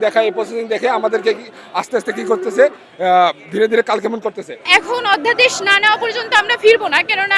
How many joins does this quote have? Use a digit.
1